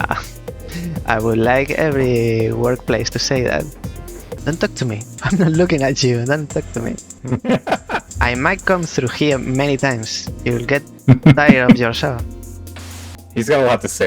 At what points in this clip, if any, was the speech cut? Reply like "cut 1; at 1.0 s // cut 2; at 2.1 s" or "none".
cut 1; at 4.3 s // cut 2; at 5.1 s // cut 3; at 7.1 s // cut 4; at 8.1 s // cut 5; at 13.1 s